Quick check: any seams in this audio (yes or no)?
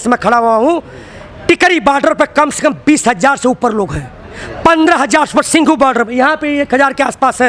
no